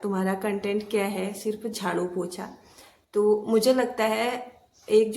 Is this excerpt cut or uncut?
uncut